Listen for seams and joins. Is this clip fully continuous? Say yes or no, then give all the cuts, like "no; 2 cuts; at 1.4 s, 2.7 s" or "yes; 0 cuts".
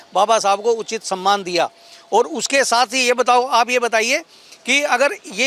yes; 0 cuts